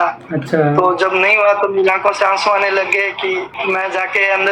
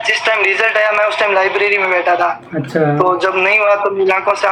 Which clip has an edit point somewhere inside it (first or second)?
first